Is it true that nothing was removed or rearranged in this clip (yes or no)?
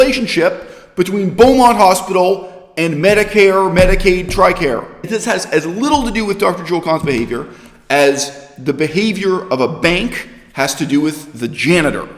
no